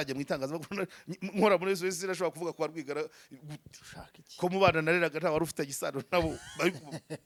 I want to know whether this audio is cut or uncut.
uncut